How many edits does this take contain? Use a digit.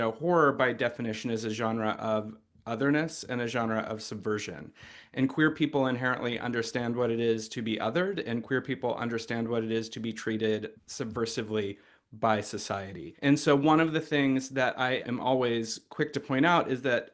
0